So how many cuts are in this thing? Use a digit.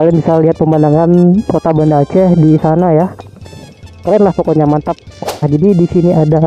1